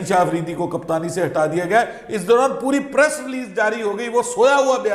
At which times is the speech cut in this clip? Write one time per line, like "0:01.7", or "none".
none